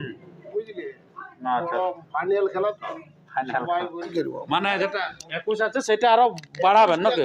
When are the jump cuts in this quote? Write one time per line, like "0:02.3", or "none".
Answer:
0:04.1